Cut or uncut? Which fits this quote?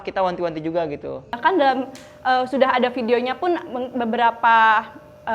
cut